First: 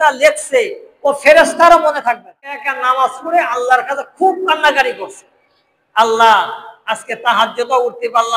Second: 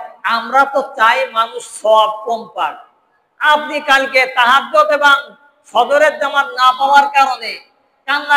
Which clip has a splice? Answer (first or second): first